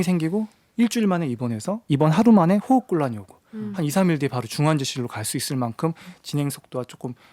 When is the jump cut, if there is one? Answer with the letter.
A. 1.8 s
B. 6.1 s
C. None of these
A